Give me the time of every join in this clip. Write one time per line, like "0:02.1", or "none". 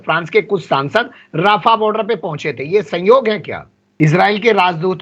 0:03.8